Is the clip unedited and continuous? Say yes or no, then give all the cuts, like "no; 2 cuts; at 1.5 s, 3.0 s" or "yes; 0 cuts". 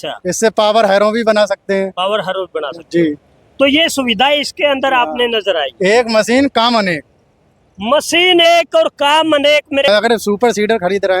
no; 1 cut; at 9.9 s